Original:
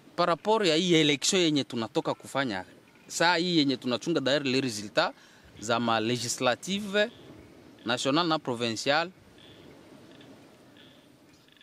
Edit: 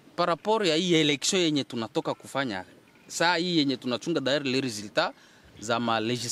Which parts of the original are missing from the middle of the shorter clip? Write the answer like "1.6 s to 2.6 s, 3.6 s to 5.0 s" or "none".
none